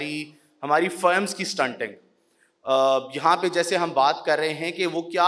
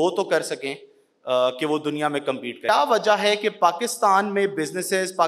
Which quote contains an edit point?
second; 1 cut; at 2.7 s

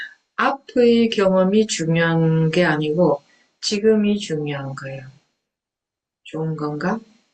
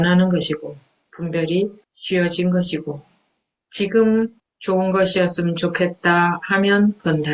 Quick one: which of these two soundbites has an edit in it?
second; 2 cuts; at 1.9 s, 4.5 s

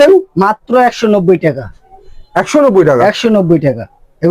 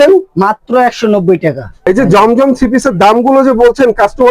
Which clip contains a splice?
second; 1 cut; at 1.7 s

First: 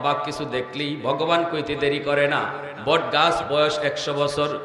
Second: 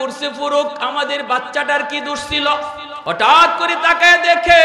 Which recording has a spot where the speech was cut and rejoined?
second; 1 cut; at 2.9 s

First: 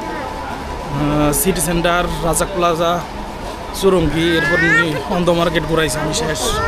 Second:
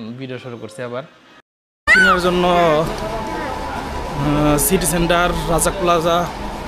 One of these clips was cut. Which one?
second; 1 cut; at 1.9 s

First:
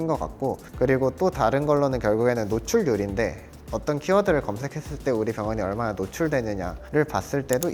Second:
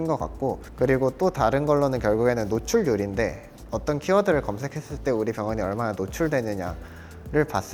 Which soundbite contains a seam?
first; 1 cut; at 6.8 s

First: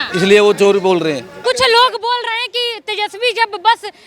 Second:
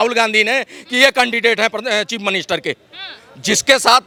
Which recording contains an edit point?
first; 1 cut; at 1.3 s

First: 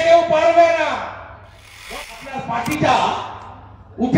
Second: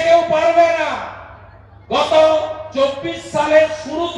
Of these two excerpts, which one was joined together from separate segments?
first; 1 cut; at 1.9 s

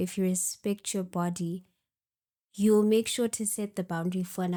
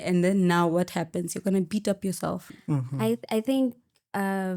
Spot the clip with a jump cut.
second; 1 cut; at 2.5 s

